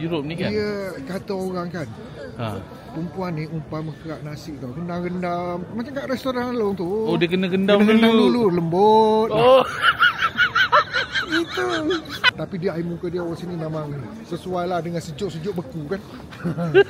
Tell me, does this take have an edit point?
yes; 1 cut; at 12.3 s

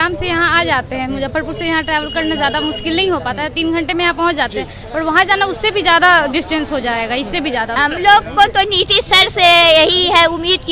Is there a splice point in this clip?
yes; 1 cut; at 7.7 s

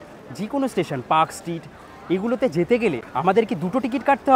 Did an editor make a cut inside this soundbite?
yes; 1 cut; at 3.0 s

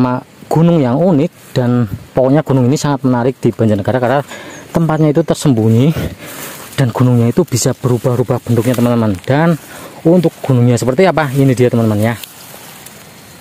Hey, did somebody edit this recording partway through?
no; 0 cuts

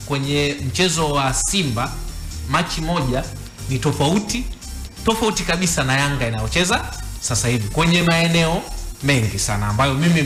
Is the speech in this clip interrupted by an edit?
no; 0 cuts

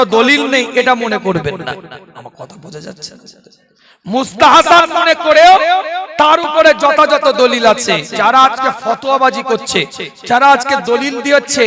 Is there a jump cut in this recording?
yes; 1 cut; at 8.1 s

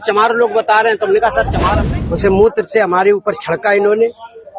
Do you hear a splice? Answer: yes; 1 cut; at 1.7 s

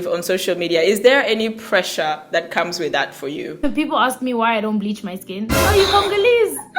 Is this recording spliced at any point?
yes; 2 cuts; at 3.6 s, 5.6 s

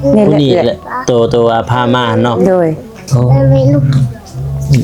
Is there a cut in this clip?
no; 0 cuts

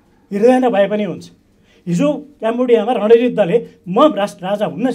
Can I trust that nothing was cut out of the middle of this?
yes; 0 cuts

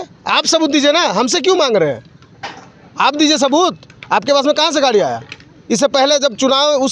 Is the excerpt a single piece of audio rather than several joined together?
yes; 0 cuts

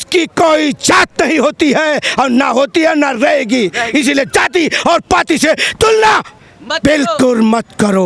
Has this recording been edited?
no; 0 cuts

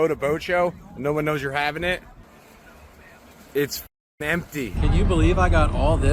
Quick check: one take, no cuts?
no; 1 cut; at 4.7 s

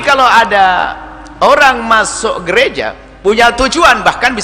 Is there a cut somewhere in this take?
yes; 1 cut; at 3.0 s

